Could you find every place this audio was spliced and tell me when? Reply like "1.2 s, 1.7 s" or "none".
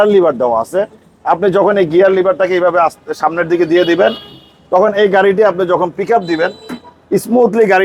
none